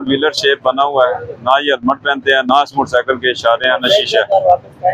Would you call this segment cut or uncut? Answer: uncut